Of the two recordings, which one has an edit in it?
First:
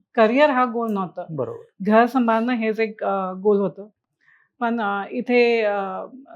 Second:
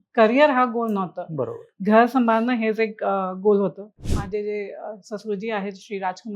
second; 1 cut; at 4.1 s

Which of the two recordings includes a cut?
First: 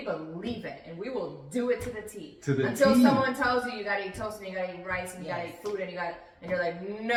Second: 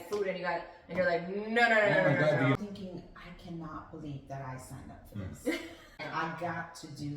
second; 2 cuts; at 2.6 s, 6.1 s

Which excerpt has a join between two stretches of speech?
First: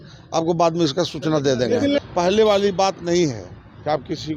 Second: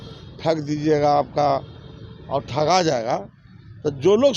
first; 1 cut; at 2.0 s

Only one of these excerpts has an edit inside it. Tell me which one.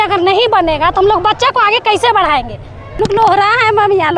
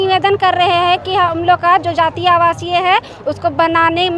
first; 1 cut; at 2.9 s

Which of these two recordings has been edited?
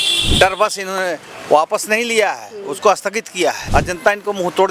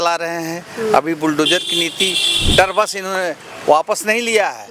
first; 1 cut; at 3.6 s

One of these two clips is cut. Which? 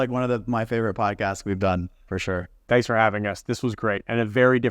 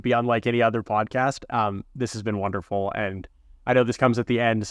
first; 1 cut; at 2.5 s

